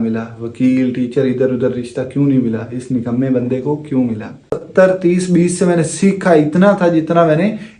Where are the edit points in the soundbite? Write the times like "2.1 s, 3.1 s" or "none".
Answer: 4.5 s